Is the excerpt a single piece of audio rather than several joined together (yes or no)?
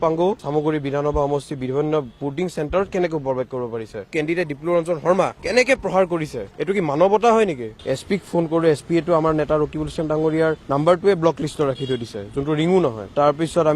no